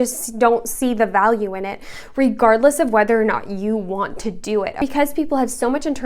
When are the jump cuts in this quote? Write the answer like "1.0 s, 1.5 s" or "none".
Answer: 4.8 s